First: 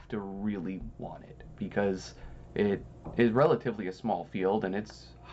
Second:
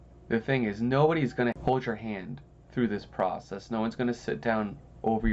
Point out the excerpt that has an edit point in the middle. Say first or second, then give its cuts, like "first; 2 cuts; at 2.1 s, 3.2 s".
second; 1 cut; at 1.6 s